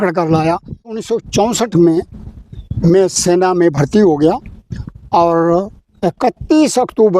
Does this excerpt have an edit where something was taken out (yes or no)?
yes